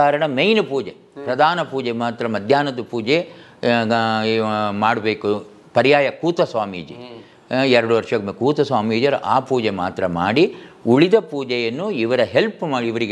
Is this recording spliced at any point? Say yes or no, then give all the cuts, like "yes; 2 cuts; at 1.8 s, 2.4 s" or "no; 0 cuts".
no; 0 cuts